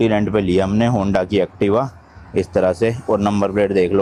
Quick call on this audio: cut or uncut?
uncut